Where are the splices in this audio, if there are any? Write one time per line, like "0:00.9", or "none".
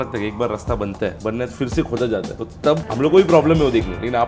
none